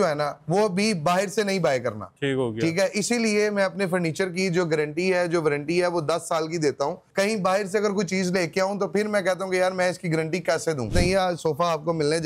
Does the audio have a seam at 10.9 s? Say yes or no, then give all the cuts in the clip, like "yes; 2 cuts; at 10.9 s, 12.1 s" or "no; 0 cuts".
yes; 2 cuts; at 7.1 s, 10.9 s